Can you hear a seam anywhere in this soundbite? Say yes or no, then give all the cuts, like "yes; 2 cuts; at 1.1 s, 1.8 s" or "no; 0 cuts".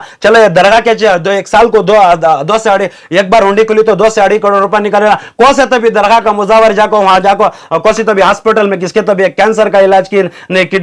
no; 0 cuts